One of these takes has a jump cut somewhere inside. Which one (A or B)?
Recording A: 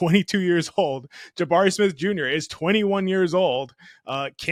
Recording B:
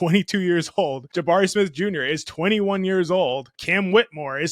B